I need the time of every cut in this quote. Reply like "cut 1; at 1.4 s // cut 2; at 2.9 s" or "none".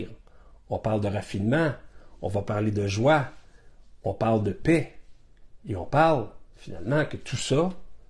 none